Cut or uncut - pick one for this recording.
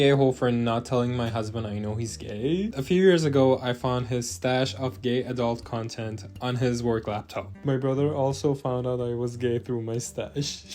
cut